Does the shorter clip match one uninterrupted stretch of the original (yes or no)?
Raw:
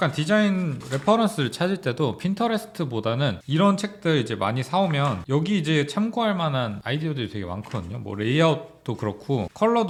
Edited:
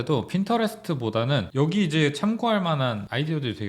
no